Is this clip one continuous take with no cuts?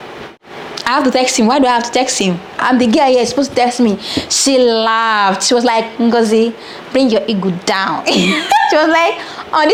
yes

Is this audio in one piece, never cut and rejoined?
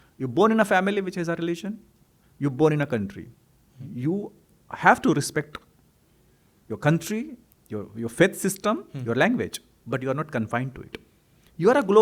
yes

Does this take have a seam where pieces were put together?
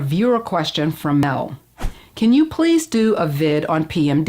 yes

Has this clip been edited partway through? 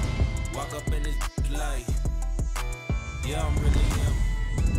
no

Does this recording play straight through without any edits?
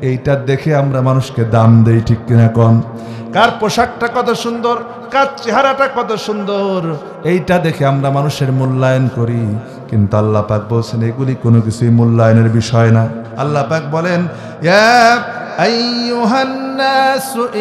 no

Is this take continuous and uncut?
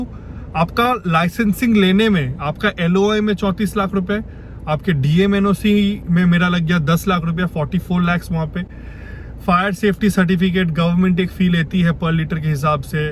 yes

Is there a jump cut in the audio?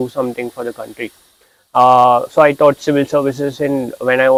no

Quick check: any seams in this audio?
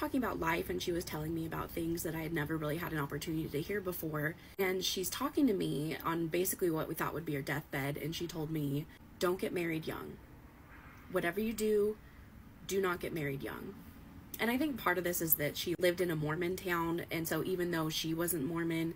yes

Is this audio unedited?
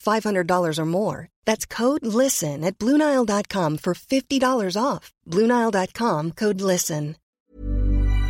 no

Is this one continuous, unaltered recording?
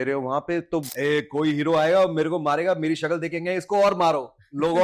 no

